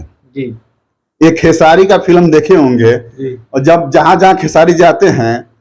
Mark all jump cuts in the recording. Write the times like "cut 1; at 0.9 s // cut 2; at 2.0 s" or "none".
none